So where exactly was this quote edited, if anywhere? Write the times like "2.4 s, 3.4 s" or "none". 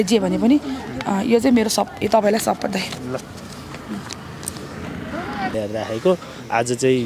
5.5 s